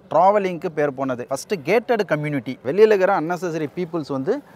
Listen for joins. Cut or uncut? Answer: cut